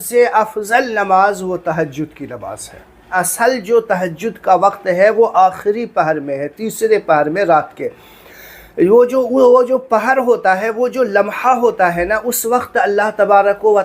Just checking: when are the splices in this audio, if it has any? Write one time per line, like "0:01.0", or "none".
0:03.1